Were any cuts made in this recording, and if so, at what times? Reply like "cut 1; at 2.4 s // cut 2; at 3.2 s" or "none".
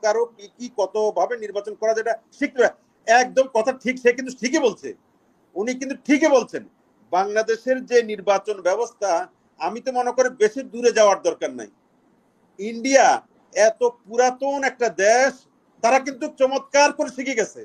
none